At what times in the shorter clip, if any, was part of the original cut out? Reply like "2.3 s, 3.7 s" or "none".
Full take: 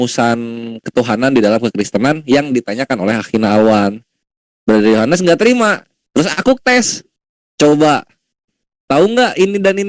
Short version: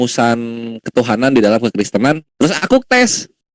2.2 s